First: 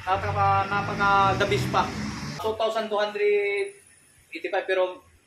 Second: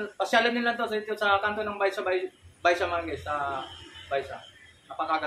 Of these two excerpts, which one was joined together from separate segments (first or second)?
first